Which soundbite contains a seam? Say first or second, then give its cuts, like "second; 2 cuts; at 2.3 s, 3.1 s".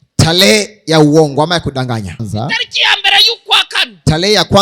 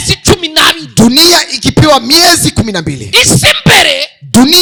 first; 1 cut; at 2.2 s